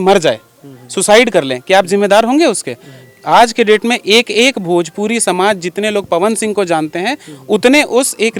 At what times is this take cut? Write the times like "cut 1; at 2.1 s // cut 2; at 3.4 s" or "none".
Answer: none